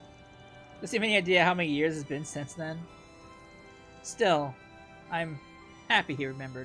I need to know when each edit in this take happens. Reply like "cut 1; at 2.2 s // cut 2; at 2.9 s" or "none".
none

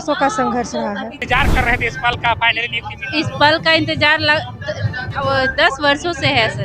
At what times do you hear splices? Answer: cut 1; at 1.2 s

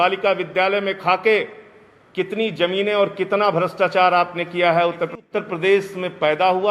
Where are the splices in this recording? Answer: cut 1; at 5.2 s

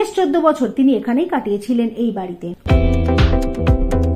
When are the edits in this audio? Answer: none

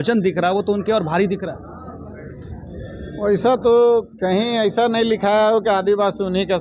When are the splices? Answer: cut 1; at 4.1 s

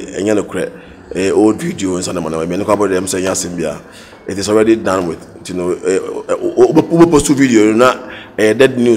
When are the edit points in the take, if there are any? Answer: none

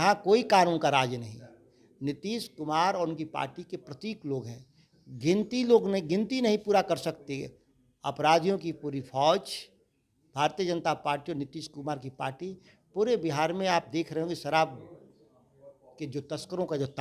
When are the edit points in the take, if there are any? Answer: none

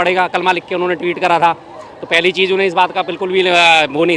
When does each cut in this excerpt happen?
none

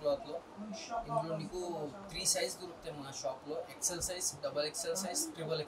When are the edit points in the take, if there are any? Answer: none

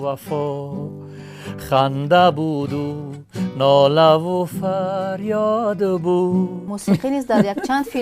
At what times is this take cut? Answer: cut 1; at 6.7 s

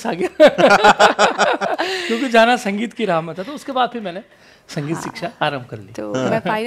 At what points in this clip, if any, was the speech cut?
none

